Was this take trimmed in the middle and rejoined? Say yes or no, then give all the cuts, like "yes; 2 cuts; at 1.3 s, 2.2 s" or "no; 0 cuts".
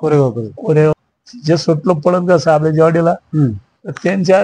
yes; 1 cut; at 0.9 s